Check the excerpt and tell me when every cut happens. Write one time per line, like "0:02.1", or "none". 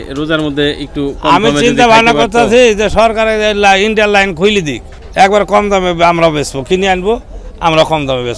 none